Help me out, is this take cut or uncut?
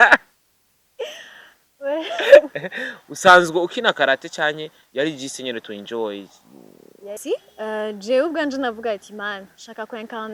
cut